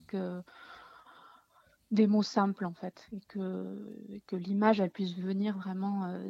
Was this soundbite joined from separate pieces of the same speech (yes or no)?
no